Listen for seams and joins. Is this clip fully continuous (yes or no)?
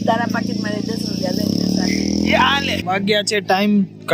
no